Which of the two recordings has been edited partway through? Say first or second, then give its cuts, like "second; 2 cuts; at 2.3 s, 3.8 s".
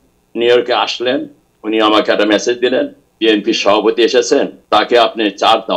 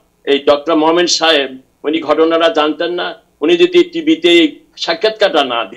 first; 2 cuts; at 3.0 s, 4.6 s